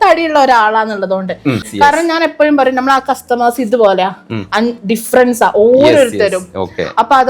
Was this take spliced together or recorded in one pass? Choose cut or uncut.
cut